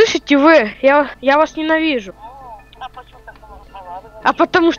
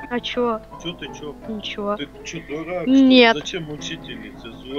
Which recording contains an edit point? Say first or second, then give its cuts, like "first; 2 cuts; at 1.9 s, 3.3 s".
first; 2 cuts; at 1.1 s, 2.2 s